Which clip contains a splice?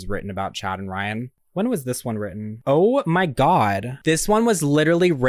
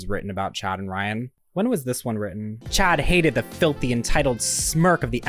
second; 1 cut; at 2.5 s

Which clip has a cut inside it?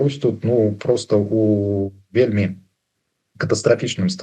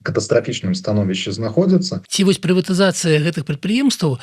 second; 1 cut; at 2.0 s

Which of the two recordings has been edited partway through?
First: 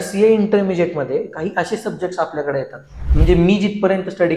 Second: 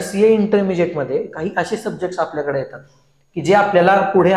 first; 1 cut; at 3.0 s

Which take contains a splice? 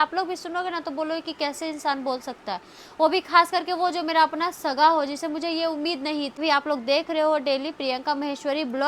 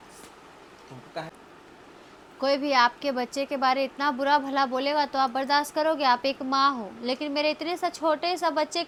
first; 1 cut; at 6.4 s

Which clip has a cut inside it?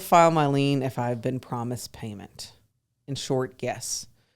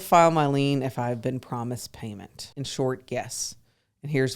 second; 1 cut; at 2.4 s

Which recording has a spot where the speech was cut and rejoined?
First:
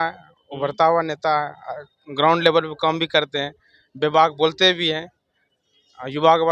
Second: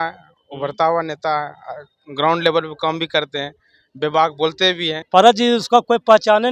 second; 1 cut; at 5.0 s

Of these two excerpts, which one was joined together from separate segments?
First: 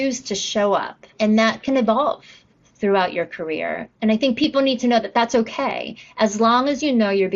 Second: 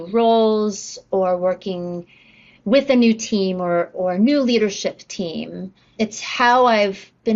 first; 1 cut; at 1.1 s

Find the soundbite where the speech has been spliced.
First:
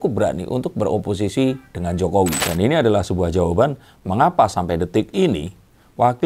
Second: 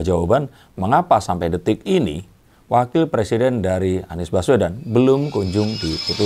first; 1 cut; at 2.4 s

